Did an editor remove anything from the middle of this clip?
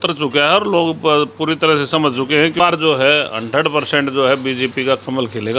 yes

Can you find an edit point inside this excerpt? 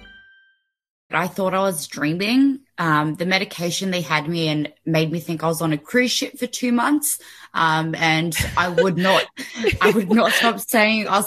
yes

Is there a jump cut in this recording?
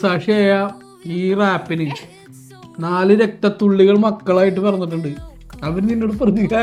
no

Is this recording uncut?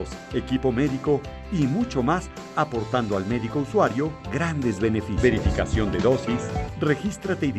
no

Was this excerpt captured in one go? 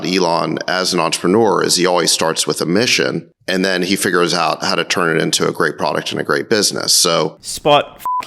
yes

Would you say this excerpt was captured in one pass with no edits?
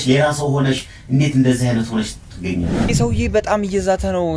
no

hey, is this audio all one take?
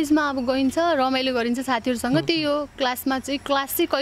yes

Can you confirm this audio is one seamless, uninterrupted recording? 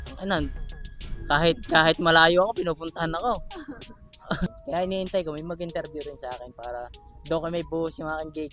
no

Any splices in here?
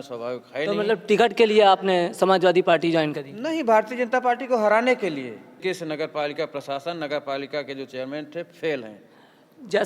yes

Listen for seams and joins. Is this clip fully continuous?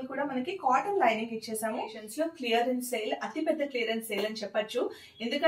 no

